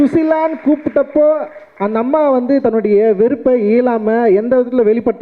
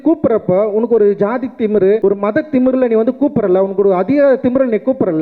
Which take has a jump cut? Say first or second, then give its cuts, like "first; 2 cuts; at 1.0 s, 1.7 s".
second; 1 cut; at 2.0 s